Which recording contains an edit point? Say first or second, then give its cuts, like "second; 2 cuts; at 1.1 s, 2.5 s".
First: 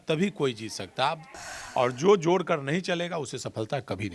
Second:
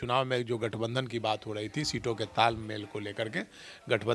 first; 1 cut; at 1.4 s